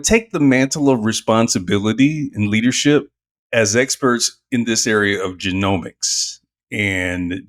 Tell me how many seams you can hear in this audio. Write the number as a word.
zero